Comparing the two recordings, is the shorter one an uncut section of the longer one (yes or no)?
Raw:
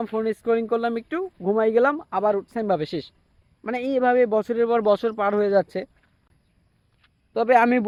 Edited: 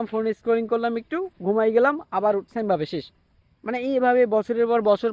yes